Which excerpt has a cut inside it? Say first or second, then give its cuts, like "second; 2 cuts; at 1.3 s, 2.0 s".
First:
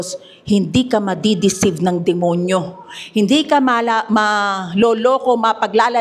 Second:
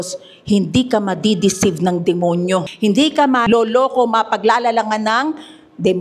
second; 2 cuts; at 2.7 s, 3.4 s